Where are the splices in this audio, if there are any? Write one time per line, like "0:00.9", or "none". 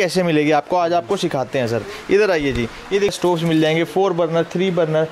0:03.2